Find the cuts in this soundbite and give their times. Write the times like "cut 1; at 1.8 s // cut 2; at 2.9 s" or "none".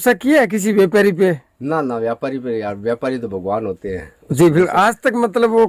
none